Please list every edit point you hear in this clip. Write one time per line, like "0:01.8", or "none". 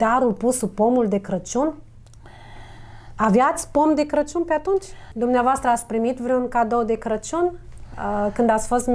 0:05.1